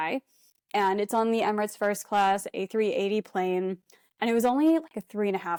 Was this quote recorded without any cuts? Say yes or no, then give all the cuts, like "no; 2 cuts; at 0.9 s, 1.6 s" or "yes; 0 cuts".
yes; 0 cuts